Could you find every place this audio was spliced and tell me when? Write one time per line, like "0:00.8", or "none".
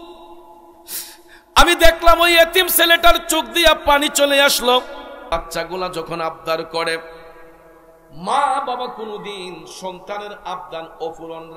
0:05.3